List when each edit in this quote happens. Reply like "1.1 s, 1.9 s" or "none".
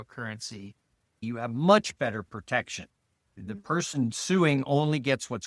1.2 s